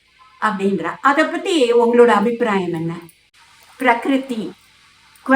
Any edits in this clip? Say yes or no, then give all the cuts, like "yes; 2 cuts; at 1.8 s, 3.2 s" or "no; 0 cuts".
yes; 1 cut; at 3.2 s